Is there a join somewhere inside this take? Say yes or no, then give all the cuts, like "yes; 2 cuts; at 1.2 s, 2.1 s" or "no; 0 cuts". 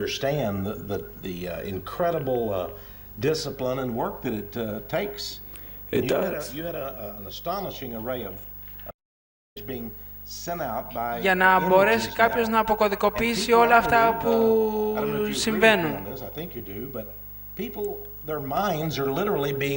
yes; 1 cut; at 4.1 s